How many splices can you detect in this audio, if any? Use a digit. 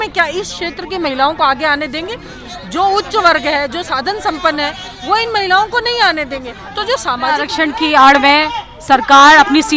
1